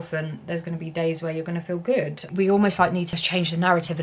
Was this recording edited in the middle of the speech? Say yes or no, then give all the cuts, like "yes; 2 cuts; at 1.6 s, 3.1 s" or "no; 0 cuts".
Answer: yes; 1 cut; at 3.1 s